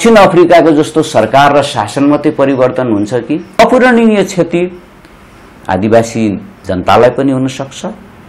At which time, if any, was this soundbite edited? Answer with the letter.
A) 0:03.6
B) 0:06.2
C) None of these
A